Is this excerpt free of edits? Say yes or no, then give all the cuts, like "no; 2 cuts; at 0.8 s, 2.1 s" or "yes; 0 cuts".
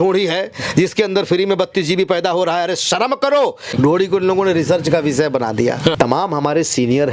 no; 2 cuts; at 3.7 s, 5.9 s